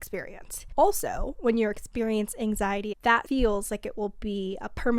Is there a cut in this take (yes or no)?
yes